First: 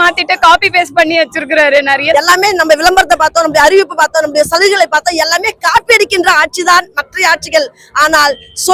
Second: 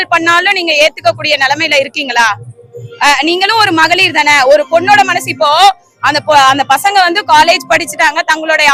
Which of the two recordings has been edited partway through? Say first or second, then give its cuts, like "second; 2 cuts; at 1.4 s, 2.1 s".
first; 1 cut; at 2.1 s